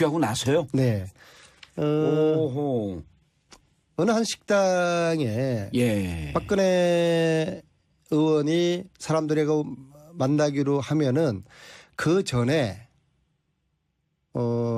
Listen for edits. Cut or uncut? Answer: cut